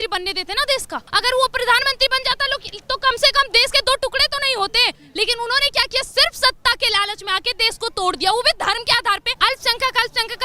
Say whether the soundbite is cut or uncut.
cut